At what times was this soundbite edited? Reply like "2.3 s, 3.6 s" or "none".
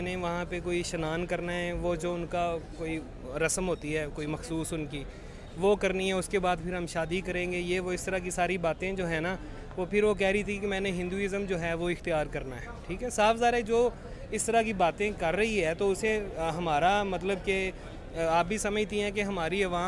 none